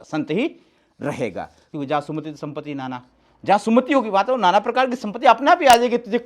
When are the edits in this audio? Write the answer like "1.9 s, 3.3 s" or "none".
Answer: 1.6 s